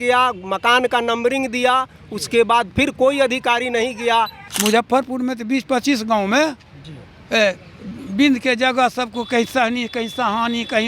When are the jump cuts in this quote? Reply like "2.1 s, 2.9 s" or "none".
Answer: 4.4 s